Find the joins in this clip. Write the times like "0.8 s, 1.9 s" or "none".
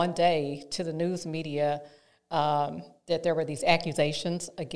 none